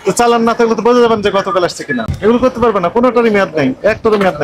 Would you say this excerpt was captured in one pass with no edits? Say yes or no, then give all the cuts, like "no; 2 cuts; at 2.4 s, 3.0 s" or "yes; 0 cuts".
no; 1 cut; at 2.0 s